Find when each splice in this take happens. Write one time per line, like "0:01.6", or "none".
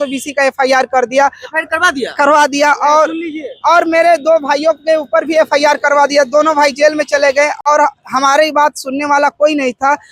none